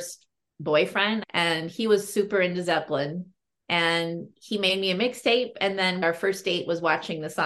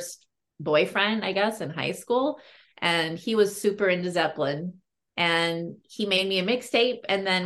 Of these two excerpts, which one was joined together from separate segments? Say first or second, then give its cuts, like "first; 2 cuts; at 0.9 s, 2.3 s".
first; 2 cuts; at 1.2 s, 6.0 s